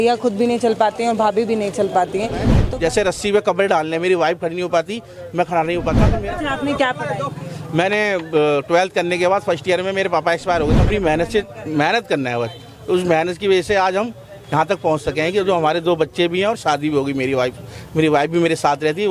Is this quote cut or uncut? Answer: cut